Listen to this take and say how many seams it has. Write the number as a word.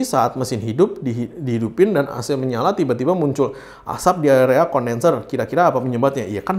zero